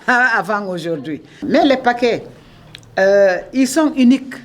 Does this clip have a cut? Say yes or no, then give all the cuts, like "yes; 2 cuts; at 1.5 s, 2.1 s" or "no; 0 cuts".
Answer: yes; 1 cut; at 1.3 s